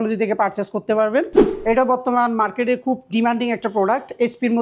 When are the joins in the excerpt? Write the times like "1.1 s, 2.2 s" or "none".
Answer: 1.4 s